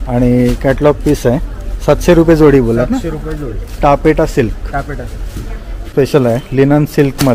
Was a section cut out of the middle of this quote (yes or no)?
yes